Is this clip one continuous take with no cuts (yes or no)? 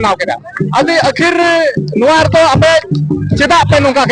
yes